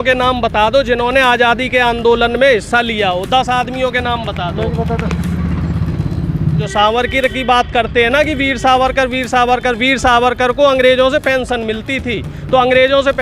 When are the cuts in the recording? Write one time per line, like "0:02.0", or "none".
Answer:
0:06.6